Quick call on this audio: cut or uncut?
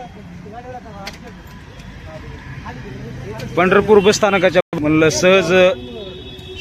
uncut